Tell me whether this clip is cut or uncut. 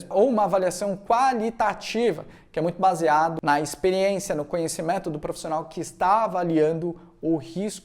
cut